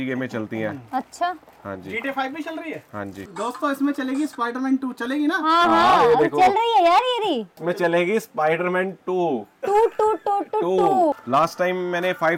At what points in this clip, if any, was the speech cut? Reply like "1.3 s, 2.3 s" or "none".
3.2 s, 11.2 s